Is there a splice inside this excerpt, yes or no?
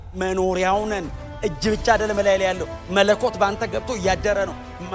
no